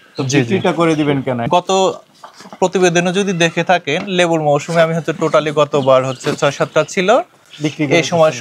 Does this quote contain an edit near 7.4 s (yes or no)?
no